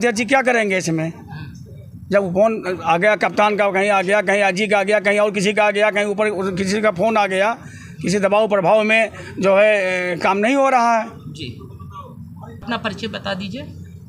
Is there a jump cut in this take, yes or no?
no